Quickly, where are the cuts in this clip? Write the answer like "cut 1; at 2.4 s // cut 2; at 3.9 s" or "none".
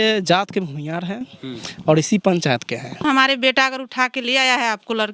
cut 1; at 3.0 s